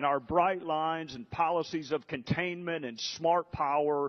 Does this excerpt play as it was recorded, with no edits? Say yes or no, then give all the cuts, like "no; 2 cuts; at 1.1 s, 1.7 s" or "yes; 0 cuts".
no; 1 cut; at 1.8 s